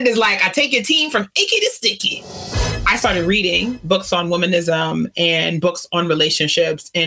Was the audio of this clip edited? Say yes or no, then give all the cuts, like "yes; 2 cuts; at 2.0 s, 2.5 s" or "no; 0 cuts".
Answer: yes; 1 cut; at 2.6 s